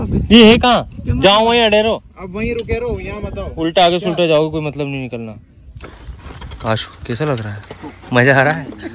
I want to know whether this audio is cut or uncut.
cut